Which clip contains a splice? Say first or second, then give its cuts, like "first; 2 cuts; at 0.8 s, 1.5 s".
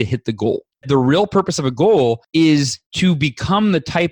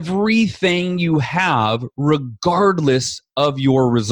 first; 3 cuts; at 0.8 s, 2.2 s, 2.8 s